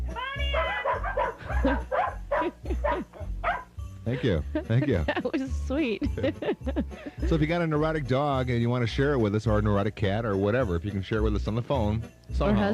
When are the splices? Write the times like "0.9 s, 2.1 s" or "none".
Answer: 10.8 s

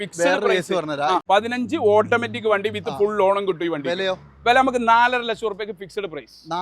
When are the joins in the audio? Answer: 1.2 s

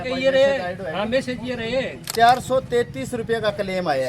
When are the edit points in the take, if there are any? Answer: 2.0 s

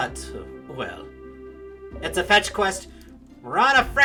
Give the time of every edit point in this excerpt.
none

